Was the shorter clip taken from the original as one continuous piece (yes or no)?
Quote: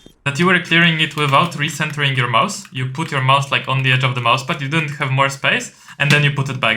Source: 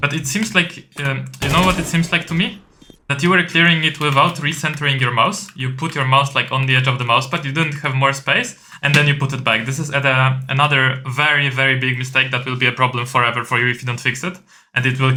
yes